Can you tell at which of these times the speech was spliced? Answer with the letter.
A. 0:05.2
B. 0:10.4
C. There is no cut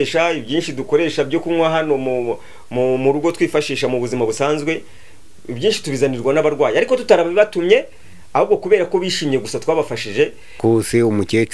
B